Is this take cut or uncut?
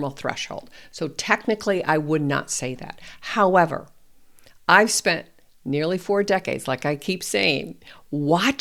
uncut